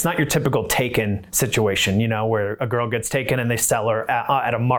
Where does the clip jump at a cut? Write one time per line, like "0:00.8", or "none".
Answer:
none